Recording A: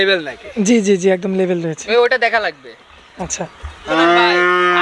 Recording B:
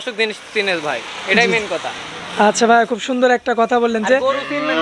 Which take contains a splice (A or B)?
A